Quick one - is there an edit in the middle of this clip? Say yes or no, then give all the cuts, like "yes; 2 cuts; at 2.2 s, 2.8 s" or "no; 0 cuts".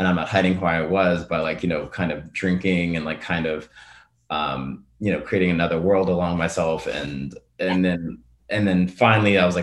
no; 0 cuts